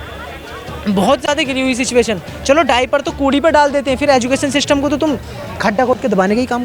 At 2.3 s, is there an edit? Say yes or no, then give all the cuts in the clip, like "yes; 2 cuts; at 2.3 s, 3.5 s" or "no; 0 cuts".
no; 0 cuts